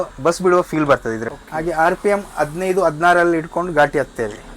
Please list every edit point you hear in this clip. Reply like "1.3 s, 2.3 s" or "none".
1.3 s